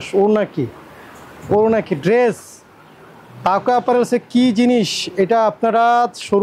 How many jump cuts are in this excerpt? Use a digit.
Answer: 0